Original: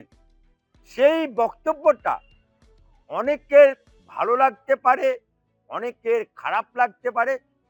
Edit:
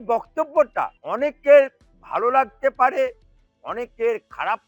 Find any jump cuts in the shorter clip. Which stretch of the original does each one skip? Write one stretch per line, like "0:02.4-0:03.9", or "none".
0:02.3-0:03.1